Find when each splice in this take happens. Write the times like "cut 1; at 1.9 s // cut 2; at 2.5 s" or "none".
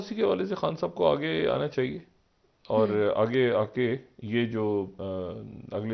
none